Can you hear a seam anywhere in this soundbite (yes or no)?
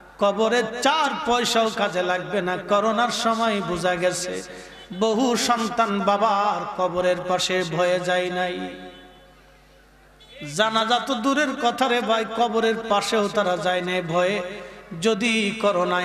no